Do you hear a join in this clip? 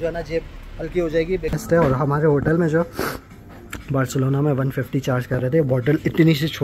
yes; 1 cut; at 1.6 s

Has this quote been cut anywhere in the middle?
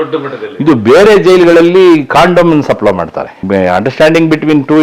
yes; 1 cut; at 3.3 s

